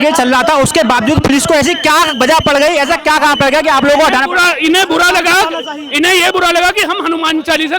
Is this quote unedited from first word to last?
yes; 0 cuts

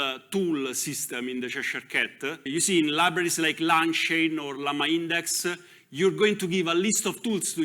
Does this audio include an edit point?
yes; 1 cut; at 2.5 s

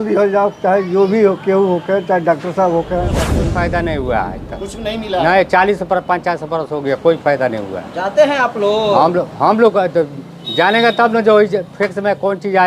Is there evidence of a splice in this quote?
yes; 1 cut; at 3.4 s

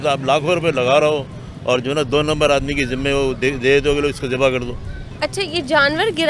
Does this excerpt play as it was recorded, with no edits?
yes; 0 cuts

